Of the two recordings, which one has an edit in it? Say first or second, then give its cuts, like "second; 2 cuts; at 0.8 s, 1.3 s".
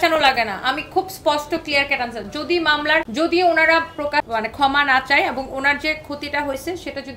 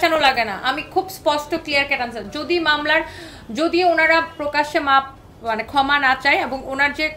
first; 2 cuts; at 3.1 s, 4.3 s